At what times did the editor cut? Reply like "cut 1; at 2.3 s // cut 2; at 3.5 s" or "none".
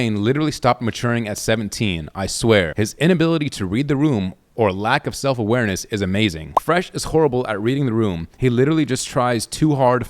cut 1; at 2.7 s // cut 2; at 6.5 s